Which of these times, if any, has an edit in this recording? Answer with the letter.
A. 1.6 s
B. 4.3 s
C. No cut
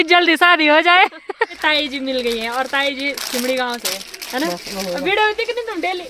A